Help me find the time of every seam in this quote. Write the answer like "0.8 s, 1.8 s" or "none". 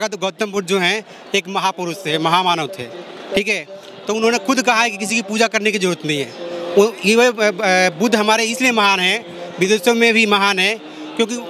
none